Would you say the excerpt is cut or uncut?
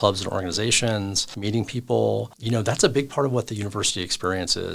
cut